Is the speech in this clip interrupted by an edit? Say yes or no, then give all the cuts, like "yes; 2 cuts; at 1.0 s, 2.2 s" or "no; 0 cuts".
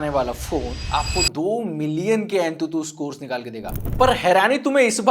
yes; 1 cut; at 3.8 s